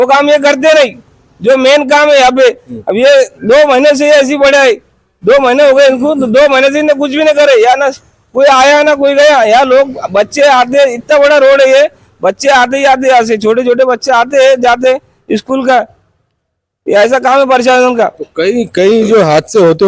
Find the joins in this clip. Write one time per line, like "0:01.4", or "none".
none

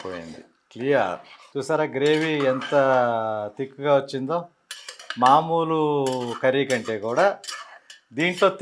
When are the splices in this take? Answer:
none

